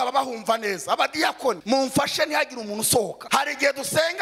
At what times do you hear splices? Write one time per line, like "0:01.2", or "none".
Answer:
0:01.6
0:03.2